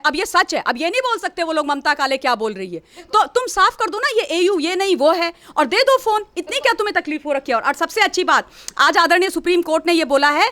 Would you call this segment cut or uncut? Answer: uncut